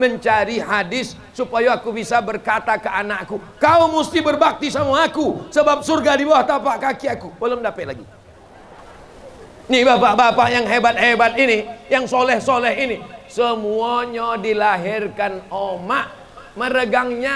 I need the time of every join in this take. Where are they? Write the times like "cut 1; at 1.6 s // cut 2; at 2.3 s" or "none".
cut 1; at 8.8 s